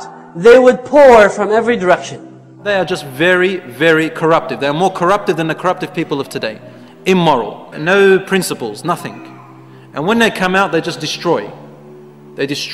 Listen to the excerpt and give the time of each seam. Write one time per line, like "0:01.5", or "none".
0:02.6